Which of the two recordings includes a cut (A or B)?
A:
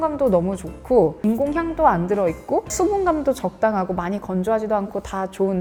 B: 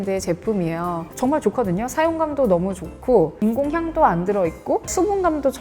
B